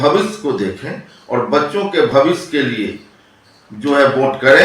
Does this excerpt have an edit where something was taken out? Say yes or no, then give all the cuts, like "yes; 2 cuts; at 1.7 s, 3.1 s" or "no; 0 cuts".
no; 0 cuts